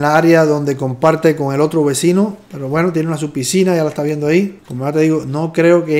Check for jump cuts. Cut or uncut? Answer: uncut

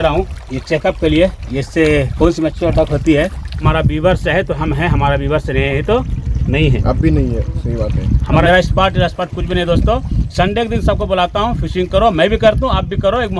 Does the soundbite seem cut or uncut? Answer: cut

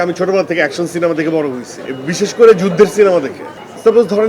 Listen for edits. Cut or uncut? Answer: uncut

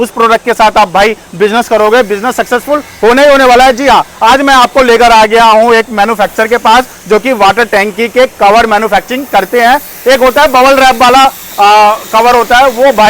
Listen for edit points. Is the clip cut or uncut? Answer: uncut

